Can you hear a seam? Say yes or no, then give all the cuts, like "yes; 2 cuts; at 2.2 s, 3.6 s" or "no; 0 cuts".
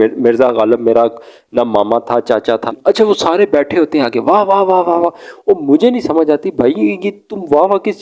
yes; 1 cut; at 2.7 s